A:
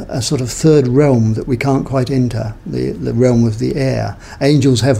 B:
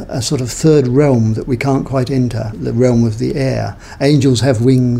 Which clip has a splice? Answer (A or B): B